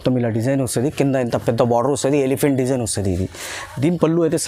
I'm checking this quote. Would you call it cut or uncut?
uncut